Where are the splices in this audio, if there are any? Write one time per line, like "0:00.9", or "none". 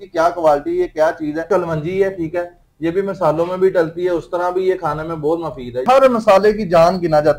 0:01.5
0:05.8

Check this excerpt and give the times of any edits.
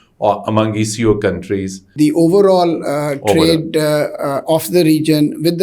0:01.9

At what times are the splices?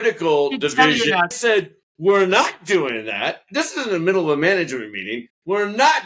0:01.4

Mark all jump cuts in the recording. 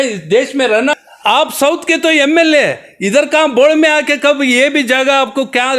0:00.9

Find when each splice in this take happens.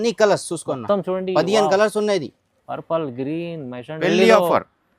0:04.0

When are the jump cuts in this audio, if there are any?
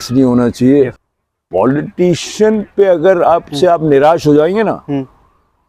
0:01.1

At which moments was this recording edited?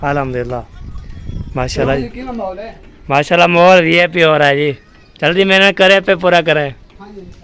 none

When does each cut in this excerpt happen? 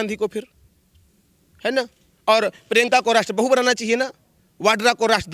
none

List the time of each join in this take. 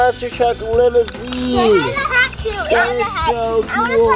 none

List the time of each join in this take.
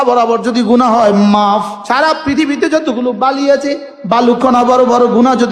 0:01.8

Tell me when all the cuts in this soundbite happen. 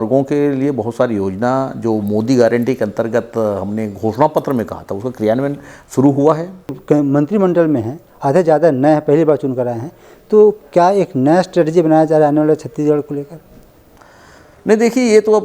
0:06.8

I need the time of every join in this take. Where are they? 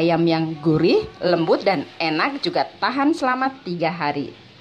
none

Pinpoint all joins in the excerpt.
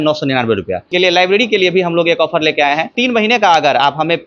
0:00.9
0:02.9

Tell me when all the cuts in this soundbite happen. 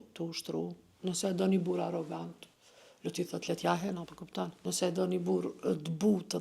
0:04.5

